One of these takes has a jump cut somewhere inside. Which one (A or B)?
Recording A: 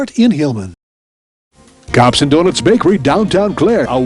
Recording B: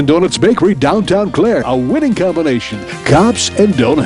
A